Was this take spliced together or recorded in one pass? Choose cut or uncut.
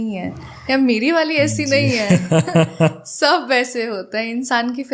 uncut